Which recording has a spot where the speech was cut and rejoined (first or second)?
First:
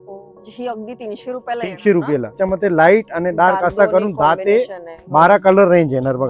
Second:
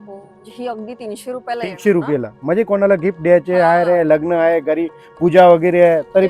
first